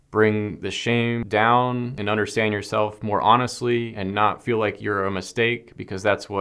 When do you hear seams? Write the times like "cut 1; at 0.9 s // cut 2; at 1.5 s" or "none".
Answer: cut 1; at 1.2 s // cut 2; at 2.0 s // cut 3; at 4.0 s